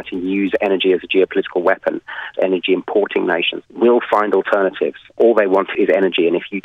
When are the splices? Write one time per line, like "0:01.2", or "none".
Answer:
0:02.3